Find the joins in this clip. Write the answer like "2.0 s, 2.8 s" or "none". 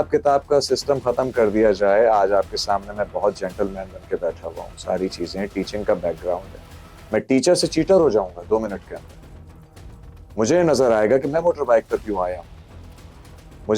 none